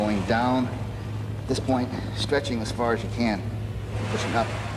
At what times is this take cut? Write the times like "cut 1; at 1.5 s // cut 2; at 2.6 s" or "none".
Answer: none